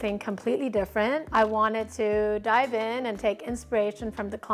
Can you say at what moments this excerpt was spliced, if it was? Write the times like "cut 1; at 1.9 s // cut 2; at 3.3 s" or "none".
cut 1; at 1.3 s